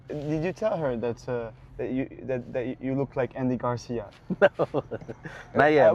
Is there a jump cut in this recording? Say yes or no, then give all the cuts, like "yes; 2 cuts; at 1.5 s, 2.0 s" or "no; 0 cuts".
no; 0 cuts